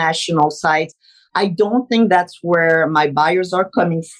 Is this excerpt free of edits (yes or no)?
no